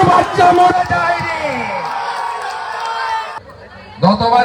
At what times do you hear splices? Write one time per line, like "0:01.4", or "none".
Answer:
0:03.4